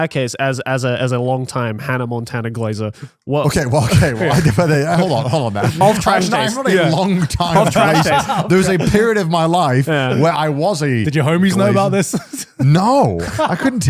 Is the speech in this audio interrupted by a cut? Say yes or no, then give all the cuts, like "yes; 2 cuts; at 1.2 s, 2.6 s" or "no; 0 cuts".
no; 0 cuts